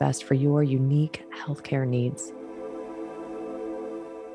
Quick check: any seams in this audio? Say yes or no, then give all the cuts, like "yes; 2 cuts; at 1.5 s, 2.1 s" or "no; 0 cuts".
yes; 1 cut; at 2.2 s